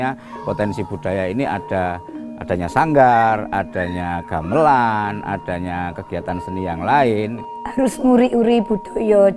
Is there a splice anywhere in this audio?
yes; 1 cut; at 7.5 s

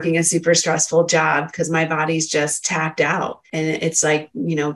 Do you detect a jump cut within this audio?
yes; 1 cut; at 3.4 s

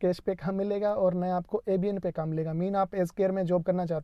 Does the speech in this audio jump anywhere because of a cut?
no; 0 cuts

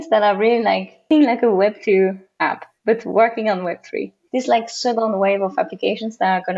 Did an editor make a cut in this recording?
yes; 2 cuts; at 1.1 s, 4.2 s

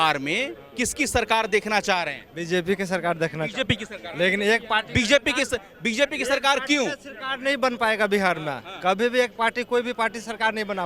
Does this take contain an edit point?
no; 0 cuts

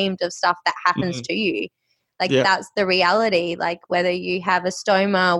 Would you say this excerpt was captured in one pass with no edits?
yes; 0 cuts

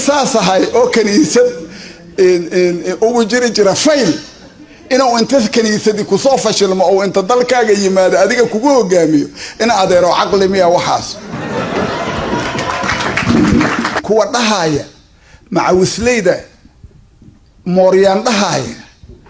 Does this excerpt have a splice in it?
yes; 1 cut; at 14.0 s

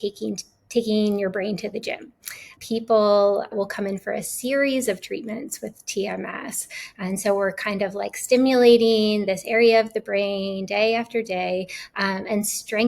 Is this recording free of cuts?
no; 2 cuts; at 2.5 s, 3.5 s

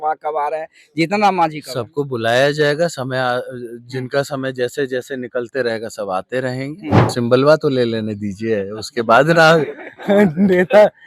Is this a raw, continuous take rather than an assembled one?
no; 1 cut; at 7.1 s

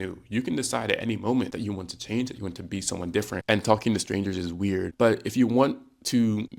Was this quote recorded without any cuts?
no; 1 cut; at 3.4 s

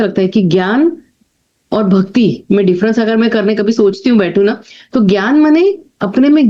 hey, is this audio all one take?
yes; 0 cuts

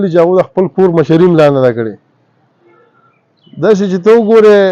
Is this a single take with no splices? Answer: yes; 0 cuts

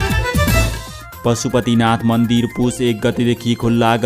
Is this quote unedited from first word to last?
no; 1 cut; at 1.0 s

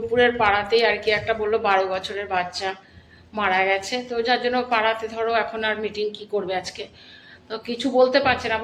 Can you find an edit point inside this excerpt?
no; 0 cuts

